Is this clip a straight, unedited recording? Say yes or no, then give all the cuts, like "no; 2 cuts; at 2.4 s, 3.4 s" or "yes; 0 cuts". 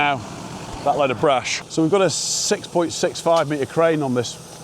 no; 1 cut; at 1.6 s